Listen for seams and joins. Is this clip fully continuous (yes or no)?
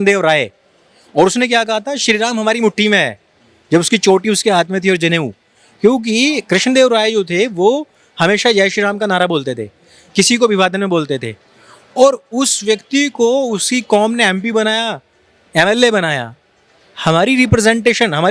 yes